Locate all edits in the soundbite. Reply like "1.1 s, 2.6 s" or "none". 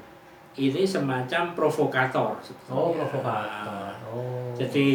none